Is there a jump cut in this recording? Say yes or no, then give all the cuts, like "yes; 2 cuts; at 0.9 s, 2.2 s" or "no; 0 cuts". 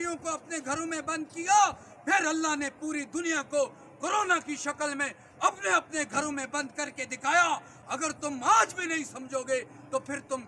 no; 0 cuts